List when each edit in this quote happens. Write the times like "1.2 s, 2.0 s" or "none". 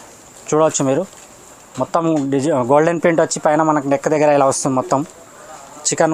none